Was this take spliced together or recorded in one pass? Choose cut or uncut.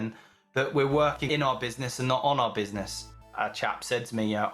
cut